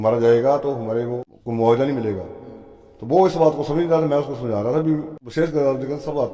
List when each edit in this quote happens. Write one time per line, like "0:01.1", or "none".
0:01.2
0:05.2